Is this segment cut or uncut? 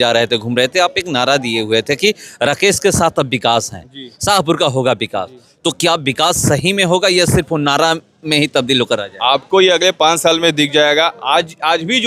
uncut